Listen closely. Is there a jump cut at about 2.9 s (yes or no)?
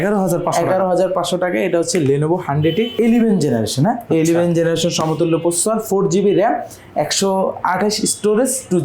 yes